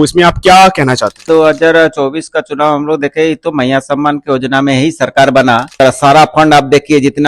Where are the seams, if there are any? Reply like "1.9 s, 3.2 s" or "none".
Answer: 1.3 s, 5.8 s

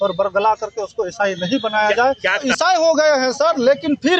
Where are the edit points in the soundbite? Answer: 2.5 s

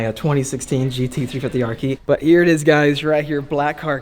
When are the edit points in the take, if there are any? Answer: 2.0 s

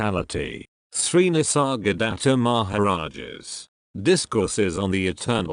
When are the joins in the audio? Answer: none

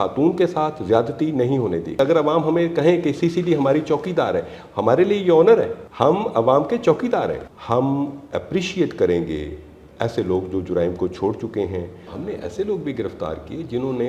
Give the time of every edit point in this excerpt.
2.0 s, 5.8 s, 7.5 s, 12.1 s

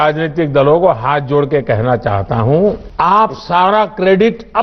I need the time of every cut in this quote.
2.9 s

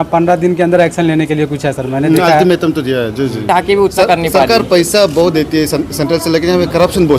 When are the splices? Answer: 3.4 s

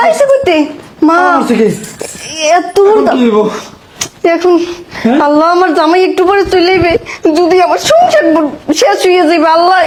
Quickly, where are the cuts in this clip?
none

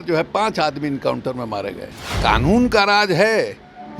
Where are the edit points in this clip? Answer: 2.1 s

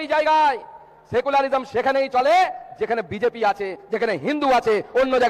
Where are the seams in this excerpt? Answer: none

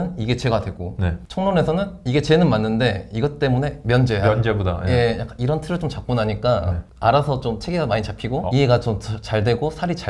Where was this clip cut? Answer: 1.2 s, 6.8 s, 8.4 s

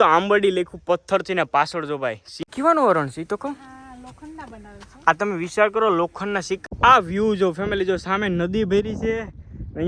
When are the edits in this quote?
2.3 s, 6.6 s

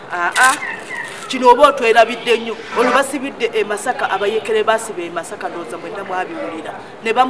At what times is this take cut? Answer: 2.6 s

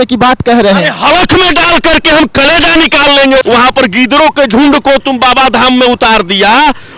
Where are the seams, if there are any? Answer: 3.4 s

